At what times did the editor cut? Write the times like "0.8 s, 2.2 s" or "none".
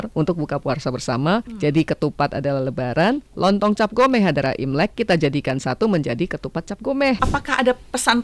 1.5 s, 7.2 s